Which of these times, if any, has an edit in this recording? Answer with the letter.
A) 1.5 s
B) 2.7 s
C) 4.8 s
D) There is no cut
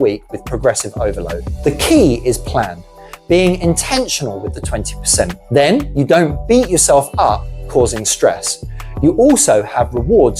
A